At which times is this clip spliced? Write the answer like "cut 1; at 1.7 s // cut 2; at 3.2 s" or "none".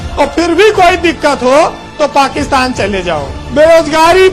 cut 1; at 3.4 s